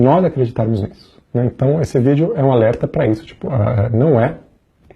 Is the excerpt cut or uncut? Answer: uncut